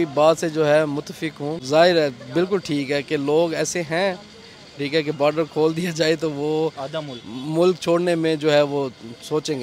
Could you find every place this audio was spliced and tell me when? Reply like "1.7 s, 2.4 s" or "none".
1.5 s